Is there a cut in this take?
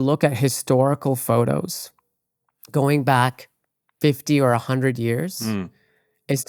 no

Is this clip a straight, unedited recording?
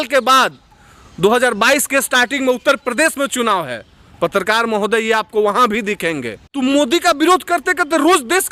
no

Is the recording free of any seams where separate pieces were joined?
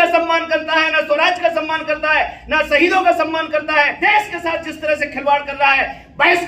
no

